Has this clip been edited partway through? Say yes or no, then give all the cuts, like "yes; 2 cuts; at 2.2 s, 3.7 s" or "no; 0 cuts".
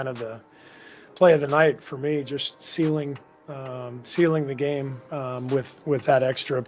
no; 0 cuts